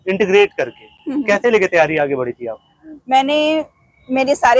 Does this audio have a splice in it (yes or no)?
no